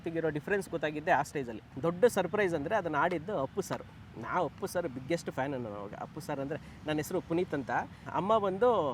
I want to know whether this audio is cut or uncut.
cut